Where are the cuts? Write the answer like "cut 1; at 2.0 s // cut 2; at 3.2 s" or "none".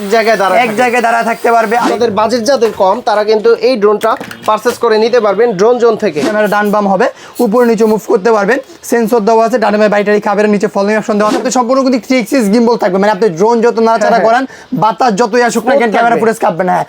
cut 1; at 1.9 s // cut 2; at 6.2 s // cut 3; at 11.4 s